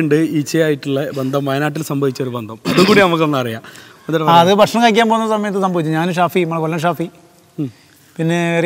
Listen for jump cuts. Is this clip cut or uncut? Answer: uncut